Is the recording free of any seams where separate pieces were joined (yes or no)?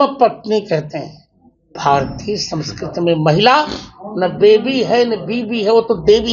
no